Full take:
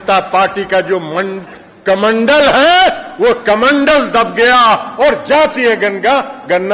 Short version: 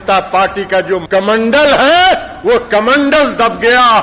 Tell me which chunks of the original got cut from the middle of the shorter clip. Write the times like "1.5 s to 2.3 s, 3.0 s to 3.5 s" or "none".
1.0 s to 1.8 s